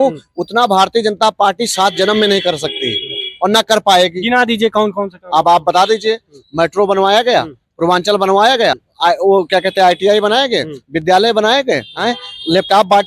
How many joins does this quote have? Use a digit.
2